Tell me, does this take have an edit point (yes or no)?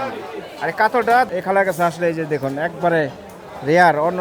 yes